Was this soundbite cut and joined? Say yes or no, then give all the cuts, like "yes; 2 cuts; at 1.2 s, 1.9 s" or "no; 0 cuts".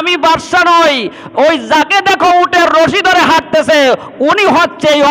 no; 0 cuts